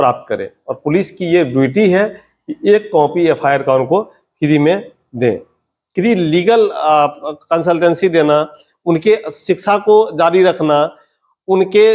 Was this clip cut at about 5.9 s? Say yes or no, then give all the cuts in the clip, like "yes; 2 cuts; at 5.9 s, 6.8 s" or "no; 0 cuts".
yes; 1 cut; at 5.9 s